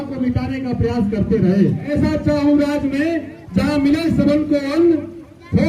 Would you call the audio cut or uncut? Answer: cut